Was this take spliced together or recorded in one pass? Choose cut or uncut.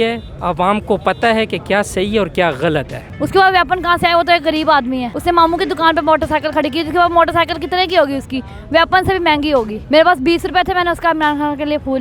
cut